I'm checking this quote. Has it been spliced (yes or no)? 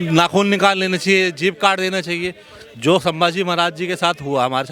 no